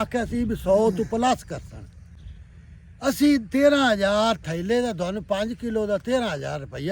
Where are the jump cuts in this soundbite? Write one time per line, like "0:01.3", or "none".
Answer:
none